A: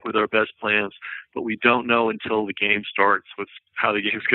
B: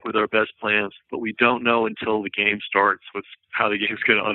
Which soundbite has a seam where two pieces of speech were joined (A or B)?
B